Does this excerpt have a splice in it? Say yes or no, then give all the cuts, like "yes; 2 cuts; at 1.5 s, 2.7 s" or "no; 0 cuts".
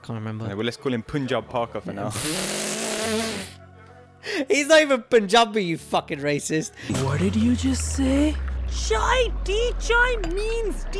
no; 0 cuts